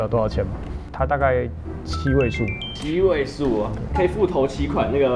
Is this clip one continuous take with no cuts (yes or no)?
yes